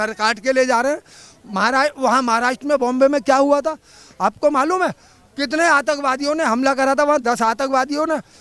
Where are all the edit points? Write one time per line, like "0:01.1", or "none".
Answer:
none

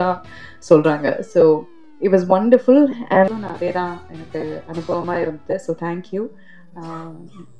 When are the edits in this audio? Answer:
0:03.4

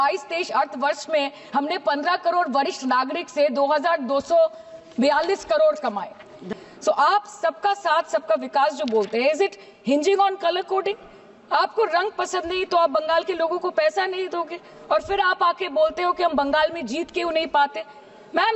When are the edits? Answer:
0:06.4

